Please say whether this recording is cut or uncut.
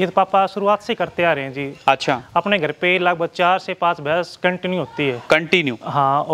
uncut